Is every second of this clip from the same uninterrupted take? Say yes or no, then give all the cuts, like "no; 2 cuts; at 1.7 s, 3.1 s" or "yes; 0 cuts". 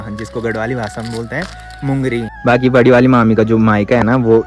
no; 1 cut; at 2.3 s